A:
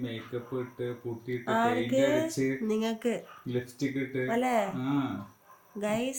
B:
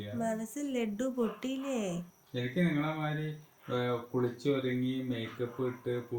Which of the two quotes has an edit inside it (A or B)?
B